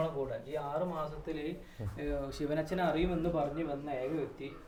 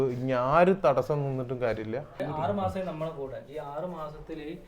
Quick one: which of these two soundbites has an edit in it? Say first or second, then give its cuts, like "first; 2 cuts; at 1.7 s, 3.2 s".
second; 1 cut; at 2.1 s